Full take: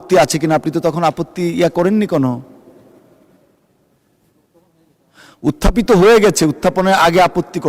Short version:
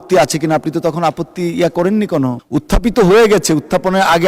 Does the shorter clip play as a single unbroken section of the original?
no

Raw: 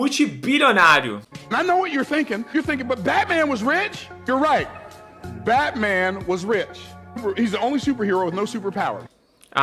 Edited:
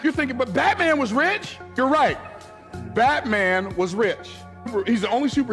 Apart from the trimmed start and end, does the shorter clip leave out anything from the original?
no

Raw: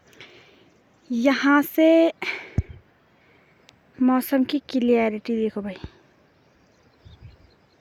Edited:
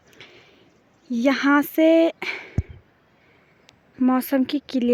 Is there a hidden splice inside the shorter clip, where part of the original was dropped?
no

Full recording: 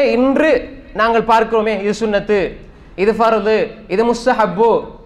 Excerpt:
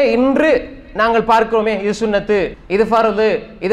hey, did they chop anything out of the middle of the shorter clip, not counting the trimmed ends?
yes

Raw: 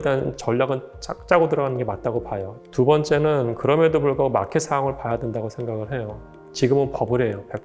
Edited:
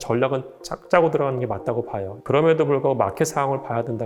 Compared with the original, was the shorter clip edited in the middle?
yes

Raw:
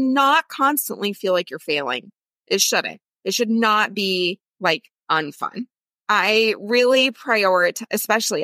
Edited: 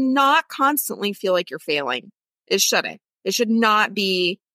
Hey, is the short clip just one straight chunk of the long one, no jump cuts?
yes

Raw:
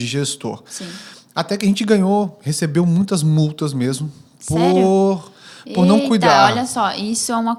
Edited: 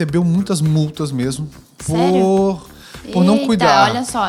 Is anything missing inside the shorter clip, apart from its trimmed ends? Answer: no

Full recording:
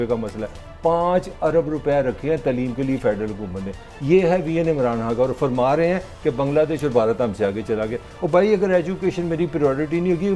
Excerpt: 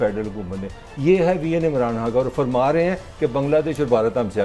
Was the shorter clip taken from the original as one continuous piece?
yes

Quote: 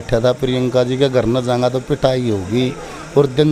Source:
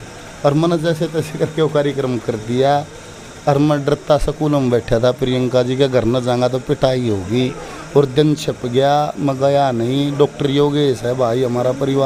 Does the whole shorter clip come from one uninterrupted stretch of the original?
yes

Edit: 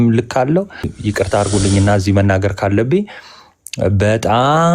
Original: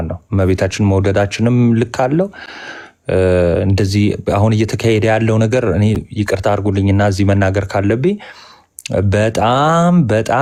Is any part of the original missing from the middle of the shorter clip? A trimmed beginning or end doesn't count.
yes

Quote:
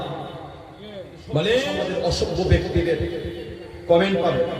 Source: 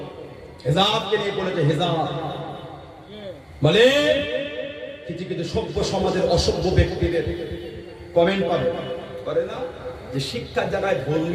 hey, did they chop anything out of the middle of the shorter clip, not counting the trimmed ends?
yes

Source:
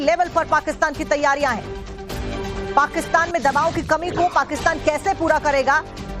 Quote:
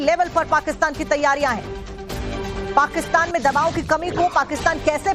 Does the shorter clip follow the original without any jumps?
yes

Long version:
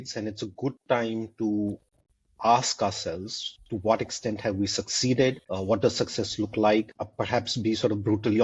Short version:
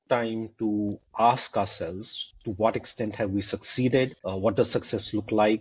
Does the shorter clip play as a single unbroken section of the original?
no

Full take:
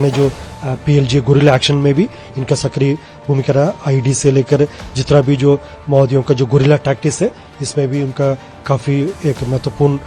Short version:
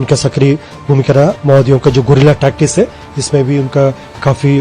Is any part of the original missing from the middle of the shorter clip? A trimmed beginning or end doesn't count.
yes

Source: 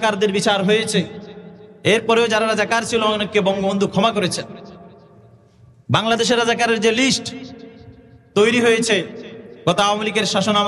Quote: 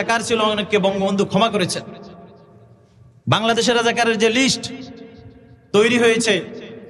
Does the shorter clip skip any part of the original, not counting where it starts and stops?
no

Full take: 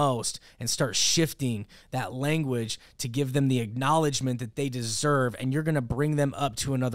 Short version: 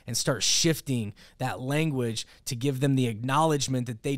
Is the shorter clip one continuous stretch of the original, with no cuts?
yes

